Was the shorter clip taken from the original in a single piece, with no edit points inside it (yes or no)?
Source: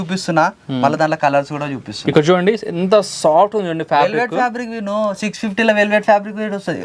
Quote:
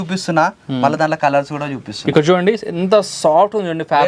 yes